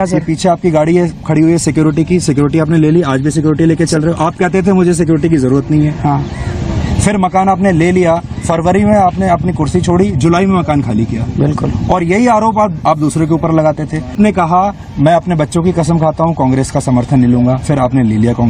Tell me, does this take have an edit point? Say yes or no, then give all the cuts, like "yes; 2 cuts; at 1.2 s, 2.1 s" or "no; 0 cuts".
yes; 1 cut; at 14.1 s